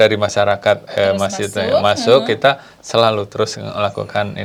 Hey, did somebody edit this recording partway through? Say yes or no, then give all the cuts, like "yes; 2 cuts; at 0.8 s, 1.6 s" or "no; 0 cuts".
no; 0 cuts